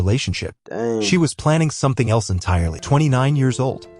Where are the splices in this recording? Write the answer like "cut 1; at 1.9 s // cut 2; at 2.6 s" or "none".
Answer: cut 1; at 2.8 s

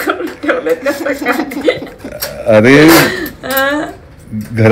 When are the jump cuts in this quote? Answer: none

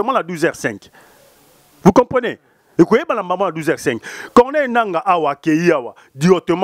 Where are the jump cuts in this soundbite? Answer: none

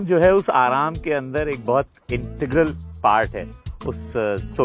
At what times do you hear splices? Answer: none

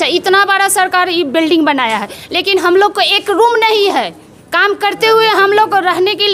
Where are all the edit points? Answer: none

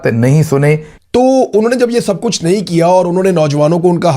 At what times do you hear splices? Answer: cut 1; at 0.9 s

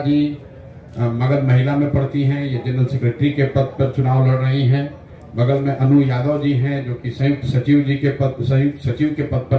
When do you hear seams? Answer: none

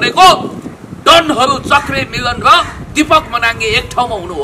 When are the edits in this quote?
none

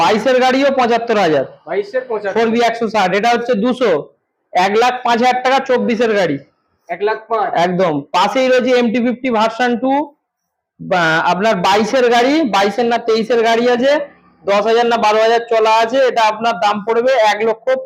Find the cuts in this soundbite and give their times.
none

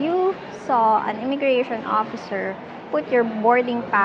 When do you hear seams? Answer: none

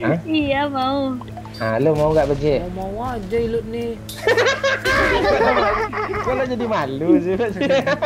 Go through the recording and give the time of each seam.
none

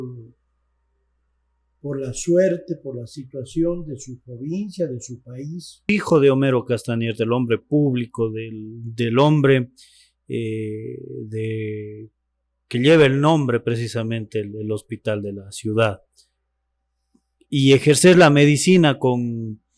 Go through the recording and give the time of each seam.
cut 1; at 5.9 s

